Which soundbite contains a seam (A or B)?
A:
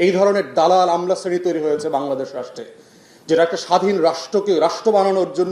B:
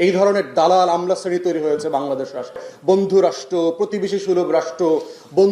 B